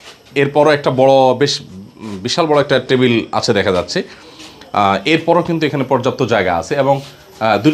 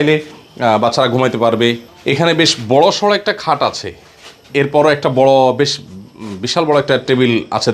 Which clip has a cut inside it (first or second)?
second